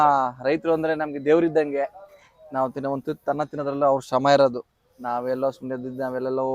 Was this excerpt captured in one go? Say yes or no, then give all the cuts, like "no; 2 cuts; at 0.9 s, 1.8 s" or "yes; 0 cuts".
yes; 0 cuts